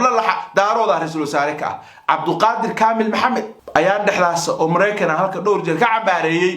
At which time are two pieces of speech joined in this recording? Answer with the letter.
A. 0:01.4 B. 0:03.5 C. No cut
B